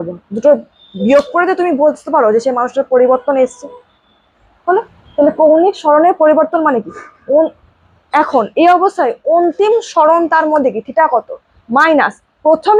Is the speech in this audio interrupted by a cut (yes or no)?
no